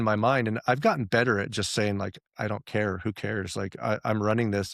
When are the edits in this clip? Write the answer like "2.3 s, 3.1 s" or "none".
none